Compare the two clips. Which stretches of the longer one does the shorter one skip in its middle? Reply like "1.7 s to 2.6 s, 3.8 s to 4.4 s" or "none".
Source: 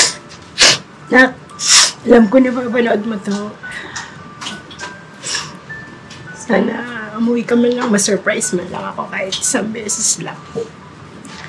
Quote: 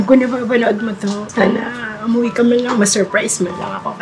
3.5 s to 6.4 s